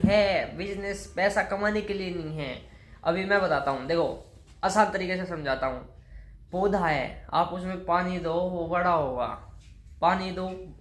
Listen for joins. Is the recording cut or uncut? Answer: uncut